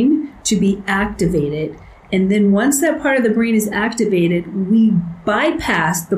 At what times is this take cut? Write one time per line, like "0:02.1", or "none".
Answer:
none